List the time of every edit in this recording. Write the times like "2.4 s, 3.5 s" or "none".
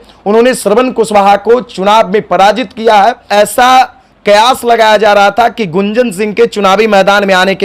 3.3 s